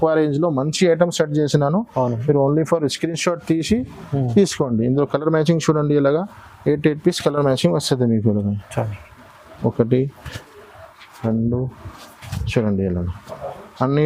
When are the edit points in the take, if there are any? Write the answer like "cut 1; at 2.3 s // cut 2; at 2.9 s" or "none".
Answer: none

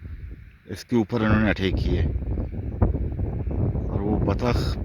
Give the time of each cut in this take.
none

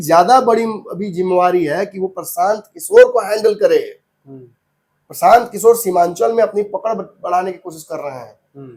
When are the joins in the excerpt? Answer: none

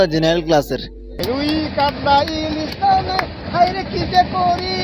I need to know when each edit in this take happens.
cut 1; at 1.1 s

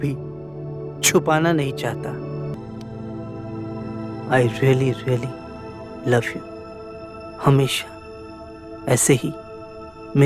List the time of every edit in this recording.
cut 1; at 2.5 s

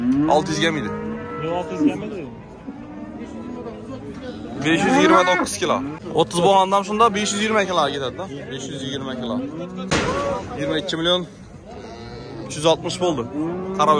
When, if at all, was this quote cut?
cut 1; at 6.0 s // cut 2; at 9.9 s

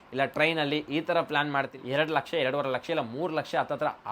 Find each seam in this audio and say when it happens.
cut 1; at 1.8 s

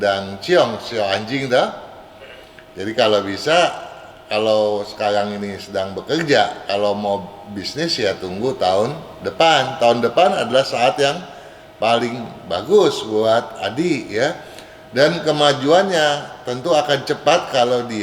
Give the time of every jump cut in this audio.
none

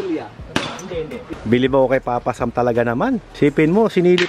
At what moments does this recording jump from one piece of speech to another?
cut 1; at 1.2 s

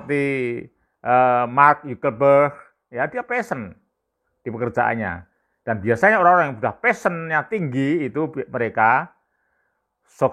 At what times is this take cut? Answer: none

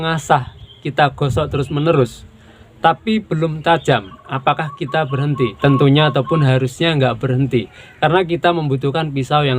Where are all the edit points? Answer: cut 1; at 5.6 s

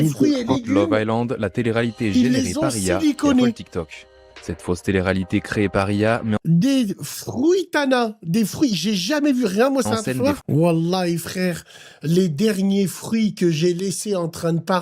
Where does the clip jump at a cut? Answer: cut 1; at 10.4 s

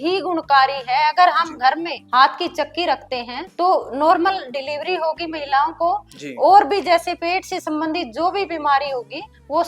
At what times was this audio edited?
none

